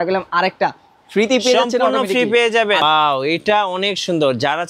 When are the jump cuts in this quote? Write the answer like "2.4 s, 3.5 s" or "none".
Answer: 2.8 s